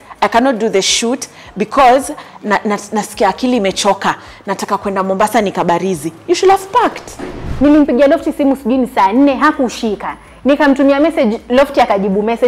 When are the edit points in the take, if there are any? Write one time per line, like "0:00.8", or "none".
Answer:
0:07.4